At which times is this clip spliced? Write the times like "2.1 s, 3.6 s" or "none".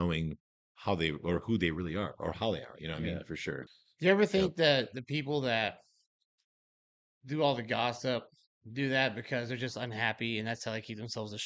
3.7 s